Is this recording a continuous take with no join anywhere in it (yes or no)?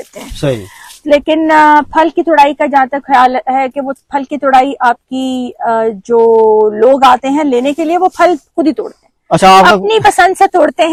yes